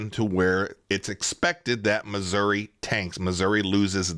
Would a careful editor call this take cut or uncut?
uncut